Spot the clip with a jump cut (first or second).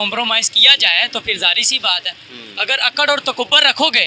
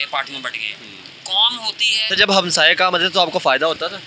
second